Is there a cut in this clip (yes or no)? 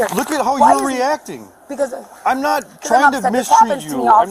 no